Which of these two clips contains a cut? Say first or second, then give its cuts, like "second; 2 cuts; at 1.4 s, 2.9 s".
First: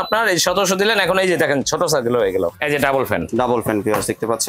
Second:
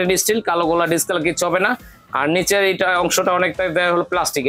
first; 1 cut; at 2.6 s